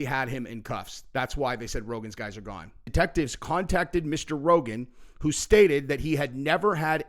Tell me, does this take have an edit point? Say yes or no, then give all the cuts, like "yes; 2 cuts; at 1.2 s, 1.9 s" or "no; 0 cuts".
yes; 1 cut; at 2.9 s